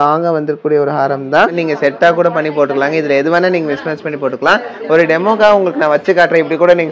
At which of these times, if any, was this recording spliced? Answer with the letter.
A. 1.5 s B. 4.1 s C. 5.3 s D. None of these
A